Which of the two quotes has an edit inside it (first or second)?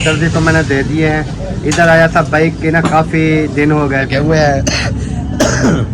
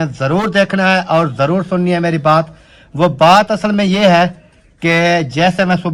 first